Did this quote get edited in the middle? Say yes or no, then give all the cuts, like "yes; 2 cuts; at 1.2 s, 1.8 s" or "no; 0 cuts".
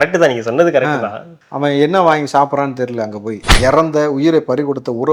yes; 1 cut; at 3.5 s